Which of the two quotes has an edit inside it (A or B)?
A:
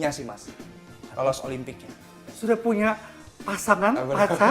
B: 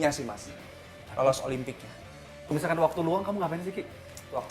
A